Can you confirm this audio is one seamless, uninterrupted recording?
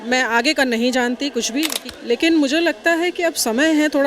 no; 1 cut; at 1.8 s

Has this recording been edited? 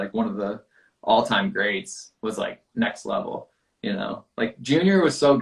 no; 0 cuts

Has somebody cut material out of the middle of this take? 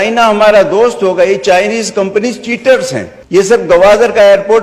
yes; 1 cut; at 3.5 s

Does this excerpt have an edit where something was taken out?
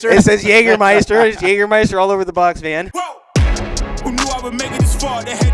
yes; 1 cut; at 2.9 s

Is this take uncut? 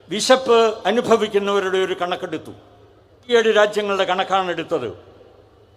no; 1 cut; at 3.3 s

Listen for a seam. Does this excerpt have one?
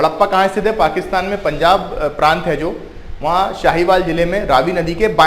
no; 0 cuts

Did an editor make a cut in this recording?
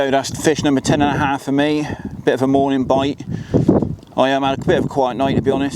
no; 0 cuts

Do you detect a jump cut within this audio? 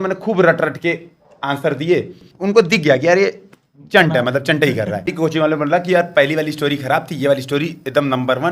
yes; 2 cuts; at 2.3 s, 5.1 s

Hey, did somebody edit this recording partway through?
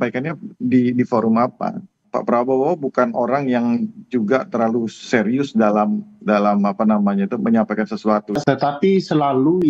yes; 1 cut; at 8.4 s

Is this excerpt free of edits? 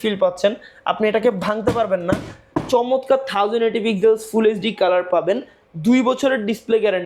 yes; 0 cuts

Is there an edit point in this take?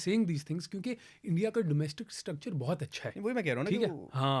no; 0 cuts

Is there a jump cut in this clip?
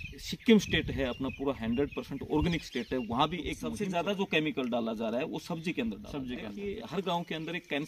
yes; 2 cuts; at 3.7 s, 6.5 s

